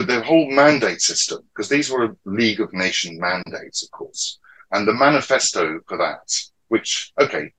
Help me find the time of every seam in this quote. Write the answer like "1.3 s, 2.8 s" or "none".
none